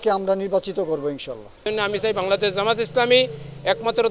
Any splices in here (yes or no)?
yes